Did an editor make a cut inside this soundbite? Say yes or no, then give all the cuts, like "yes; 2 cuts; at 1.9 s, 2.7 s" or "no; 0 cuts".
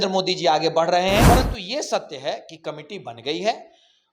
yes; 1 cut; at 1.3 s